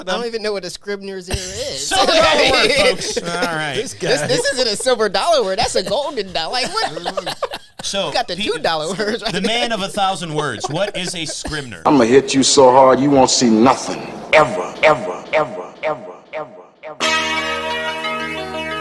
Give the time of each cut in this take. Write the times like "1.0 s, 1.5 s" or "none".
11.8 s